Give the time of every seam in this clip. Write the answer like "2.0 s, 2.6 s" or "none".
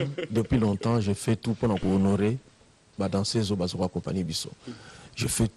3.3 s